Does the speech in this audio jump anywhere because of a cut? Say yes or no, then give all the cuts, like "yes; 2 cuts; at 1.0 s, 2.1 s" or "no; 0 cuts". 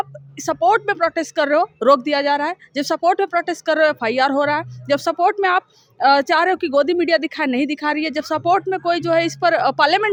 no; 0 cuts